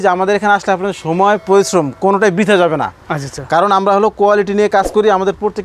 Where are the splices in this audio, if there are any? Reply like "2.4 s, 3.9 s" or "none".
none